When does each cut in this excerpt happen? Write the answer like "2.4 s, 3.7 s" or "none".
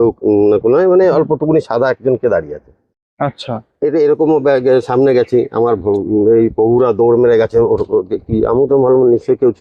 none